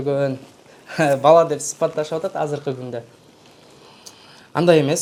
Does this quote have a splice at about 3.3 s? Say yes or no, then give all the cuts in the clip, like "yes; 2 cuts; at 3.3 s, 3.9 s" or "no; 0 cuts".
no; 0 cuts